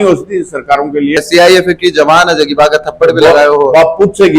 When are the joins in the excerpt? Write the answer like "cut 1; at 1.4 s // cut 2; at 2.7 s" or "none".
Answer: cut 1; at 1.2 s